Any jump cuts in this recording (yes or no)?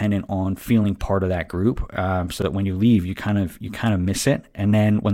no